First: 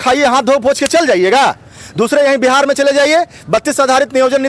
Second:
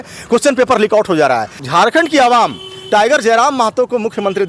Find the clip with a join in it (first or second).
second